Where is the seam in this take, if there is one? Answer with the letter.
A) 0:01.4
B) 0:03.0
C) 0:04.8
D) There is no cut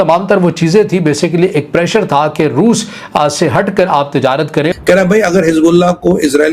C